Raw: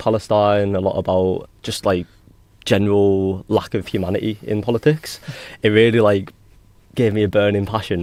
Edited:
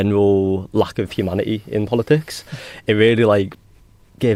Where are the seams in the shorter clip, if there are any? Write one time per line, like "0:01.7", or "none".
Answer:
none